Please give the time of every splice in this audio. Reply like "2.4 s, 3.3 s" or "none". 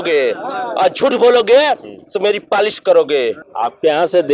3.4 s